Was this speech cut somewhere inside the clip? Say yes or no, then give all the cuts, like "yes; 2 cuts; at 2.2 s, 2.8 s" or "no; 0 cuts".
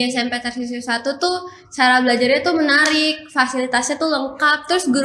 no; 0 cuts